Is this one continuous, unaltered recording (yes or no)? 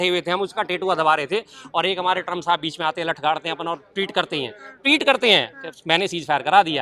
yes